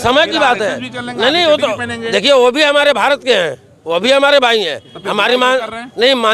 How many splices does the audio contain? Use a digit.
0